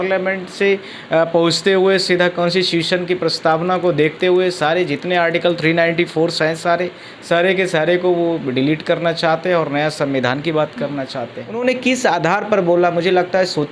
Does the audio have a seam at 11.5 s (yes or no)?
yes